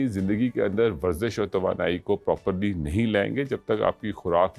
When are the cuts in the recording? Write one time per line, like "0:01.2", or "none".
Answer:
none